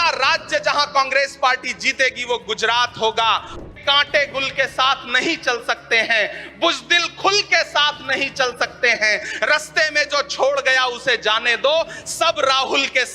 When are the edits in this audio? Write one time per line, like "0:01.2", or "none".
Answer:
0:03.5